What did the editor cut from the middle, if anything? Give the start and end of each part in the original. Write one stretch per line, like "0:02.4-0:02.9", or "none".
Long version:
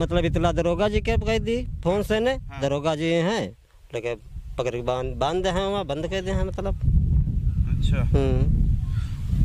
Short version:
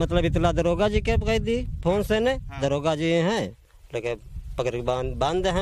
none